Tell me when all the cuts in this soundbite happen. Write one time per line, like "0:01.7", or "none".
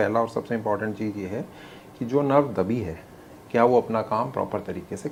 none